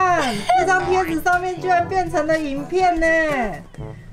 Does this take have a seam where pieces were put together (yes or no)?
no